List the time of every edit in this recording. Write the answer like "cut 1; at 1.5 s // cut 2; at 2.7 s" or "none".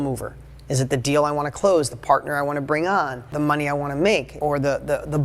cut 1; at 3.2 s // cut 2; at 4.3 s